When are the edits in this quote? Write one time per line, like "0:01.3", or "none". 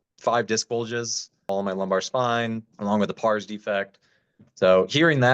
0:01.5
0:02.7